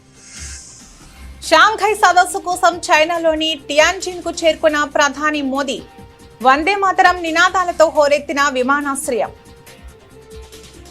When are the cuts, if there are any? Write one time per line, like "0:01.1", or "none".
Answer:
0:01.0